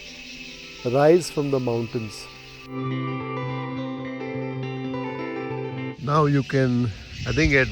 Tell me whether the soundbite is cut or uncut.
cut